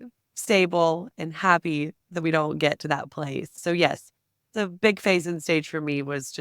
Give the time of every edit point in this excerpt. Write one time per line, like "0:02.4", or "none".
0:03.6